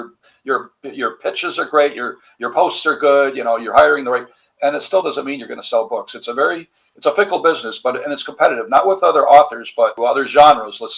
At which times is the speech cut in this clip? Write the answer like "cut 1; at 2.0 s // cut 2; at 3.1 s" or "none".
cut 1; at 10.0 s